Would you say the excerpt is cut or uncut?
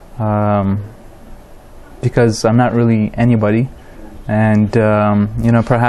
uncut